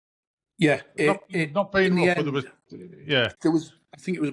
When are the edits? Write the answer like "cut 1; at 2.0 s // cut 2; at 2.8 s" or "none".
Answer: none